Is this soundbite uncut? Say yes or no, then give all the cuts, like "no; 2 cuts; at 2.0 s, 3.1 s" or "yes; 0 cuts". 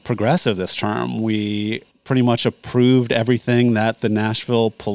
no; 1 cut; at 1.9 s